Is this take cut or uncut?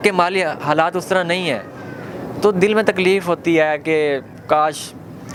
uncut